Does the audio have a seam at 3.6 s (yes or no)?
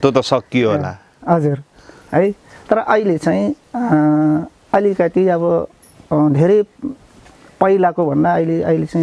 no